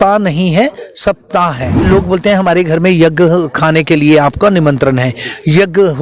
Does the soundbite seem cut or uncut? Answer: cut